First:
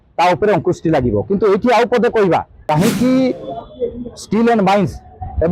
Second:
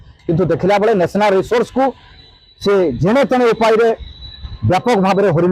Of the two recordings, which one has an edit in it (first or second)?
first